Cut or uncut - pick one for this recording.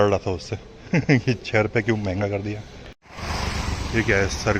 cut